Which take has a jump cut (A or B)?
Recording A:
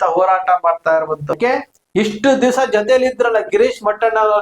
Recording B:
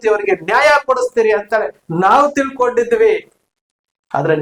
A